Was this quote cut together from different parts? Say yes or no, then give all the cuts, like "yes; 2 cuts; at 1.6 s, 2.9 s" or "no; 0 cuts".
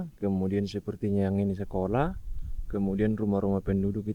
no; 0 cuts